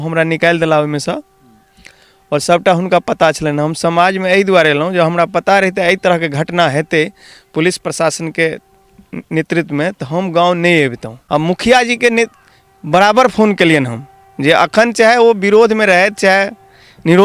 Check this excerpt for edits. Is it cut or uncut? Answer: cut